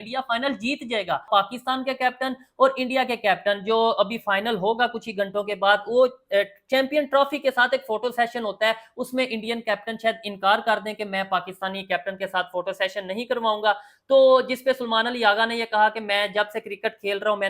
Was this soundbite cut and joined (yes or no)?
yes